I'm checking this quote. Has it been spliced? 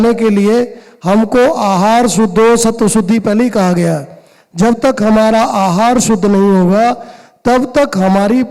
no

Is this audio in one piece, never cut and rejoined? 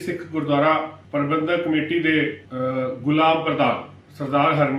no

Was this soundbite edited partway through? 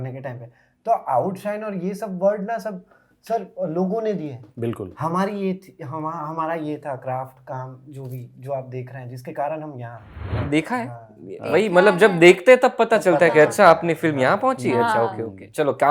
yes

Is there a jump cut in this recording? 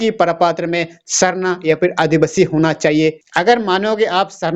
yes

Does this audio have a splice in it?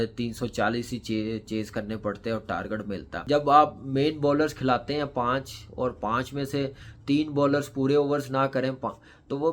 yes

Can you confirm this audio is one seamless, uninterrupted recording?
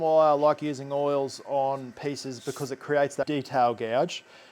no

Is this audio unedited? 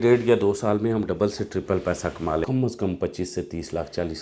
no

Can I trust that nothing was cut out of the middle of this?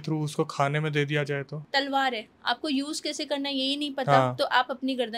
no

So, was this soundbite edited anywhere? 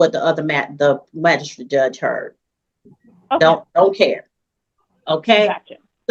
no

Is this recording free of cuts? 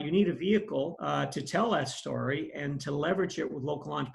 no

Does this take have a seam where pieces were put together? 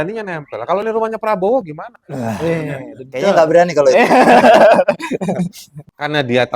no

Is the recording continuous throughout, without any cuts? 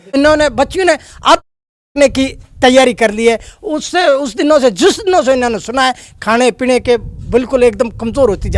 yes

